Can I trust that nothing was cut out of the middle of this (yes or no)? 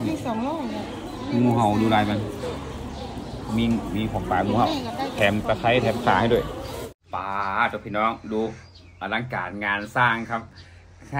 no